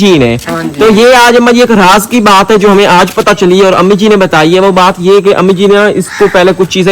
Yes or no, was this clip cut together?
no